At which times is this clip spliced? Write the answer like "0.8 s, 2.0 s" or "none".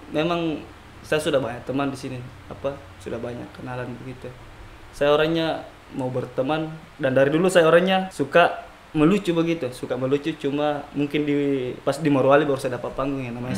8.2 s